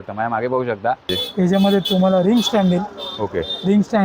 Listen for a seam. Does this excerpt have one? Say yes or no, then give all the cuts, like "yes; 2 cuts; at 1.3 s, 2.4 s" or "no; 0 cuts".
yes; 1 cut; at 1.2 s